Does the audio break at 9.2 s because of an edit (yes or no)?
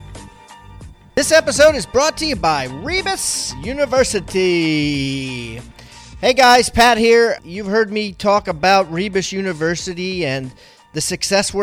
no